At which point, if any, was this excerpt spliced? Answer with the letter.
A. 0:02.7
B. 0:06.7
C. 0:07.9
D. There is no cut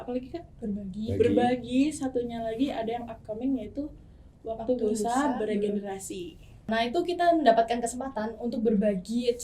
B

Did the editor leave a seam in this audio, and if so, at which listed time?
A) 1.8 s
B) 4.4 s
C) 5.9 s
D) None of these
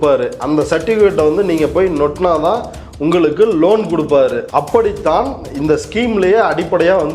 B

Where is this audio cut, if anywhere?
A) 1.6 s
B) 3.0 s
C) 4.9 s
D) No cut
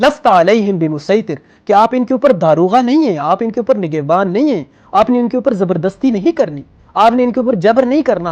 D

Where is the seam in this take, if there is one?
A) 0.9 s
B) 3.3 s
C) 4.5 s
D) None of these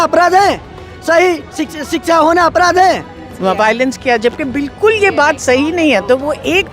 B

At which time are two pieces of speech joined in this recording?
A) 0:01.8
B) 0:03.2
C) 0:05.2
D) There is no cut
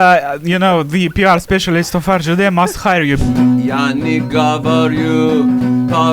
B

